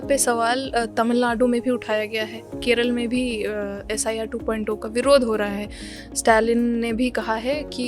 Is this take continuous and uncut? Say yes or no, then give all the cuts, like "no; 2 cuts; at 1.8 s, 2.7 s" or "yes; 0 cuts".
yes; 0 cuts